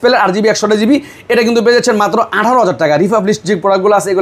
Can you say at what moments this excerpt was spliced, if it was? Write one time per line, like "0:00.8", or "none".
none